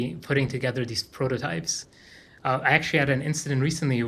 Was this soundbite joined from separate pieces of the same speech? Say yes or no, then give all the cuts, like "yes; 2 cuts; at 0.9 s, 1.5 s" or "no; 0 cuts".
no; 0 cuts